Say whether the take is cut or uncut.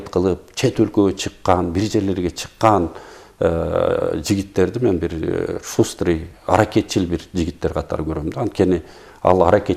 uncut